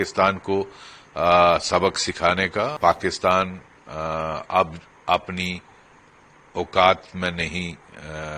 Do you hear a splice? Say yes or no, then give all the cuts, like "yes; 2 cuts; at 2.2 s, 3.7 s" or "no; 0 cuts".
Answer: yes; 1 cut; at 2.7 s